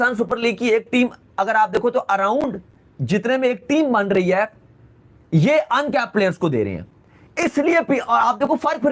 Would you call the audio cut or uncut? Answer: uncut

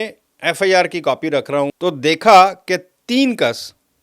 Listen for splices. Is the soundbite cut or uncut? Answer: cut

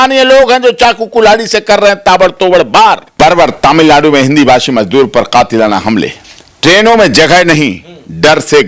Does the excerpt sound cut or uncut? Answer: uncut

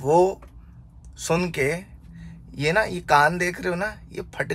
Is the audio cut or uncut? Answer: uncut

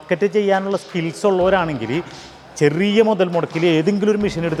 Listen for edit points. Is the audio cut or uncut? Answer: uncut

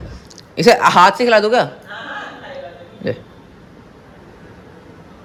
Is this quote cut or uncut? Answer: uncut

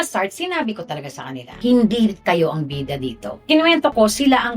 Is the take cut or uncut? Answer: cut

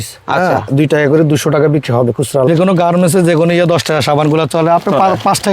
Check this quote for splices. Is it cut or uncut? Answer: cut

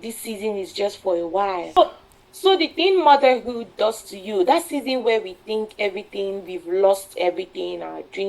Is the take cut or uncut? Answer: cut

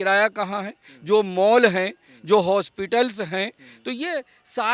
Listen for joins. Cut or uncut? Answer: uncut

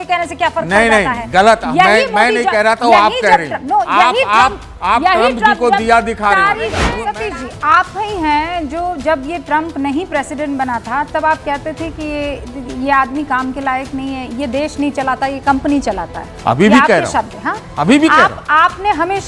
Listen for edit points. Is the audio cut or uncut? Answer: cut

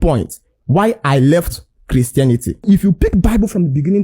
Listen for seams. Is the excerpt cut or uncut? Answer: cut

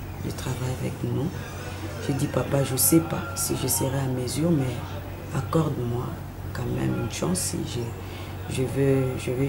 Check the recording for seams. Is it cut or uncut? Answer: uncut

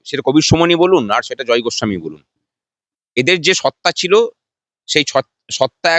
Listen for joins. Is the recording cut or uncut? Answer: uncut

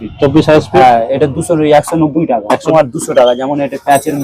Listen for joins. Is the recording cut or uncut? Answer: cut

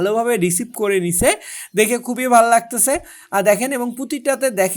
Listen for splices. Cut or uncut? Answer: uncut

